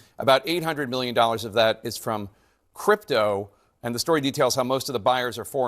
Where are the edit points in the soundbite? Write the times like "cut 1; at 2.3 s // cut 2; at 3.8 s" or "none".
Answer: none